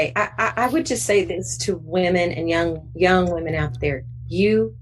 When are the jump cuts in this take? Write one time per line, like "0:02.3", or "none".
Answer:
none